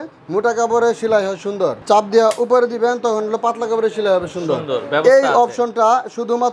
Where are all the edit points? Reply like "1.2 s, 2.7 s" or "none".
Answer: 1.8 s